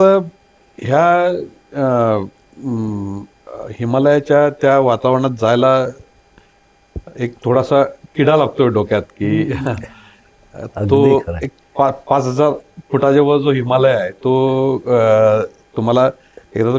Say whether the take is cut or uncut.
uncut